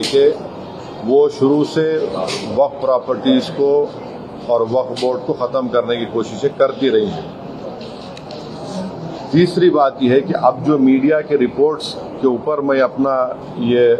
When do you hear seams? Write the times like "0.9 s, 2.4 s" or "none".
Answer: none